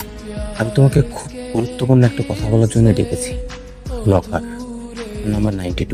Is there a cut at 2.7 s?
no; 0 cuts

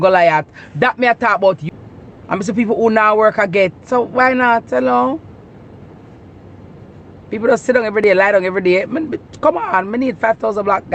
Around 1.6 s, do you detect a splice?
yes; 1 cut; at 1.6 s

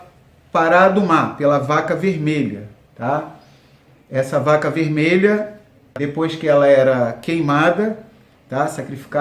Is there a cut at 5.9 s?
yes; 1 cut; at 5.9 s

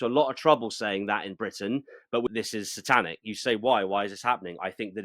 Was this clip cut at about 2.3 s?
yes; 1 cut; at 2.3 s

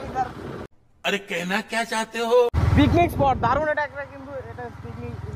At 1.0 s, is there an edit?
yes; 2 cuts; at 1.0 s, 2.6 s

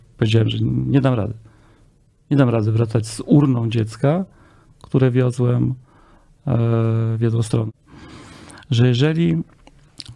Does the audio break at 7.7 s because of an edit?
yes; 1 cut; at 7.7 s

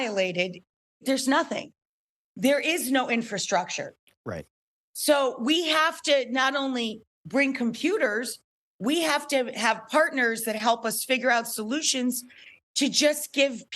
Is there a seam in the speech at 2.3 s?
no; 1 cut; at 1.0 s

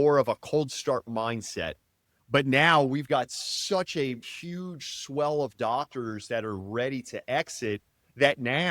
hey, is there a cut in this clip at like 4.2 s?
yes; 1 cut; at 4.2 s

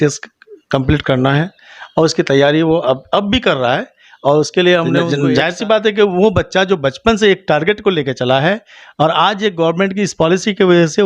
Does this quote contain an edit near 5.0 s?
yes; 1 cut; at 5.0 s

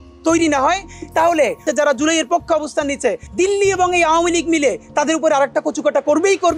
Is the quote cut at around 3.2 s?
yes; 2 cuts; at 1.7 s, 3.2 s

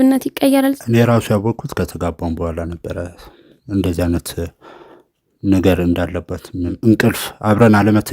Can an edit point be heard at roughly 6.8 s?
yes; 2 cuts; at 0.8 s, 6.8 s

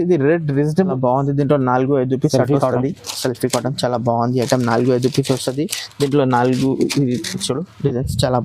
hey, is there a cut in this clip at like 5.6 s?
no; 1 cut; at 0.9 s

